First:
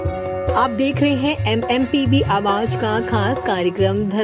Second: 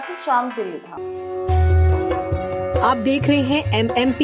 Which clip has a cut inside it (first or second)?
second